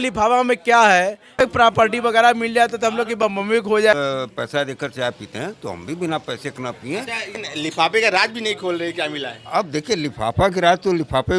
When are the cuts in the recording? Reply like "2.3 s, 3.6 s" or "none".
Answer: 1.4 s, 3.9 s, 7.3 s